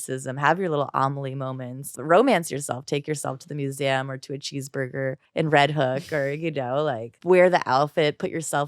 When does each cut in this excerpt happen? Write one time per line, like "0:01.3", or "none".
0:02.0
0:05.2
0:07.1